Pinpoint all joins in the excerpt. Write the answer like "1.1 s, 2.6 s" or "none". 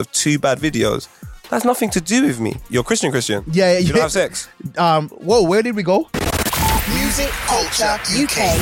2.7 s, 6.1 s